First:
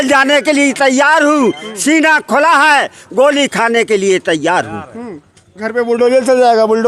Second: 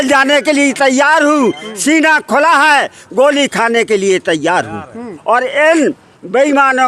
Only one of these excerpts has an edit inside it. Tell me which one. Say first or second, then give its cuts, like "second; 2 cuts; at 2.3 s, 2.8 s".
second; 1 cut; at 5.1 s